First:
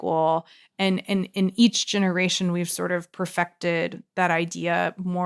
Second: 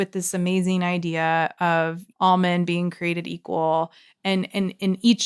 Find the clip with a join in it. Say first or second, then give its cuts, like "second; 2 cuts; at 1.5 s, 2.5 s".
second; 1 cut; at 2.0 s